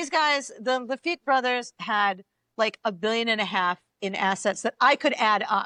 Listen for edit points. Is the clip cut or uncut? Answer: uncut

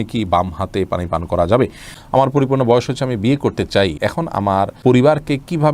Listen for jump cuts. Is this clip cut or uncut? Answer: cut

